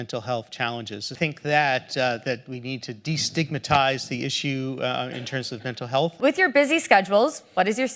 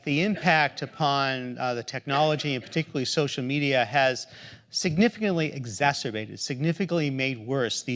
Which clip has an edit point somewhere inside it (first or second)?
first